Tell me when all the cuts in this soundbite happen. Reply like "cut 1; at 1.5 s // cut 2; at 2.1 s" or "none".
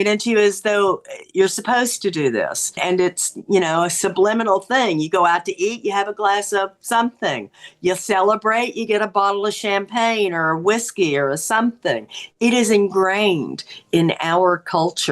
cut 1; at 2.8 s